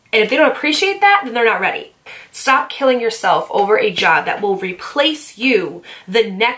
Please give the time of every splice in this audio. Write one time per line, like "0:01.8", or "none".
0:02.2